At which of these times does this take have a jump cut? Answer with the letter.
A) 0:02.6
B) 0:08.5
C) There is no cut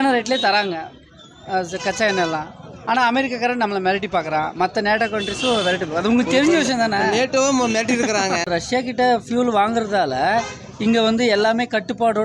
B